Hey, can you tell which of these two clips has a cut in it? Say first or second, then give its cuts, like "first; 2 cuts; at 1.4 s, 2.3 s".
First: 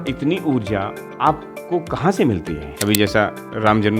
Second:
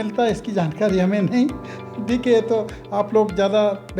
first; 2 cuts; at 1.0 s, 2.6 s